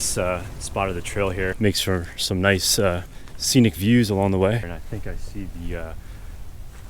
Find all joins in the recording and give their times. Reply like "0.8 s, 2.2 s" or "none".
1.5 s, 4.6 s